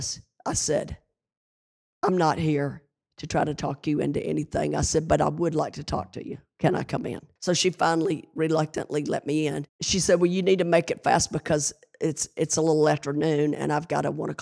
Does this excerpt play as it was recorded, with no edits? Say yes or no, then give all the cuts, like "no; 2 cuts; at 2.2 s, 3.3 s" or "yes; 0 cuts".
no; 2 cuts; at 7.3 s, 9.7 s